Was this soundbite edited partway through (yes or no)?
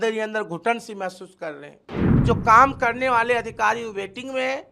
yes